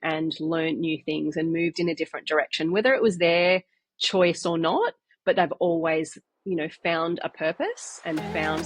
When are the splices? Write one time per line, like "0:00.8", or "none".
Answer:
none